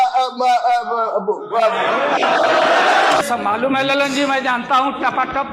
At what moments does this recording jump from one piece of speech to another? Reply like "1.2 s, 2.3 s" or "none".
3.3 s